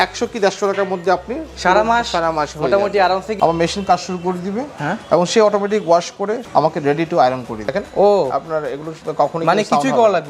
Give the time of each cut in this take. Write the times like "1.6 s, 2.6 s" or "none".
3.3 s, 6.5 s, 7.6 s